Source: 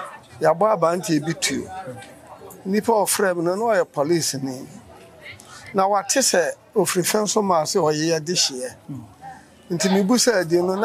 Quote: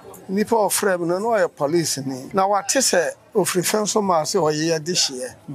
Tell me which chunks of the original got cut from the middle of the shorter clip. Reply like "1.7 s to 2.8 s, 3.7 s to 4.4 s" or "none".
4.6 s to 5.6 s